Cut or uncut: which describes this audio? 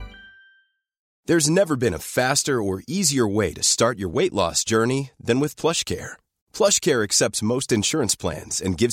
cut